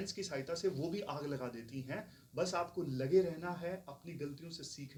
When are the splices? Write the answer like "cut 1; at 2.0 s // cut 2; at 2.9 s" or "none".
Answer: none